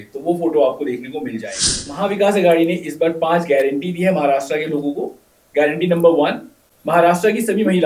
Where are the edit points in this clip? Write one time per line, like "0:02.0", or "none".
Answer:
0:01.8